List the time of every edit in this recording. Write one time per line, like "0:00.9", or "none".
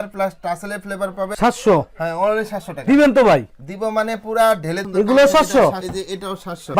0:01.3
0:04.8